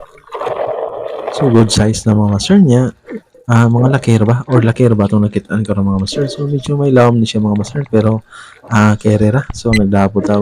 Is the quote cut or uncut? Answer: uncut